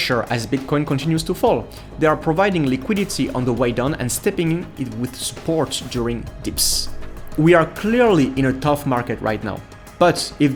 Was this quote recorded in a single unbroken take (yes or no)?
yes